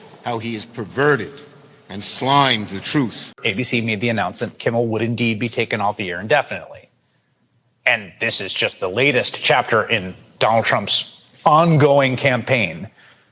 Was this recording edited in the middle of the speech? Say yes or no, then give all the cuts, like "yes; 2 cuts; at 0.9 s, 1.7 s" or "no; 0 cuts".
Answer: yes; 1 cut; at 3.4 s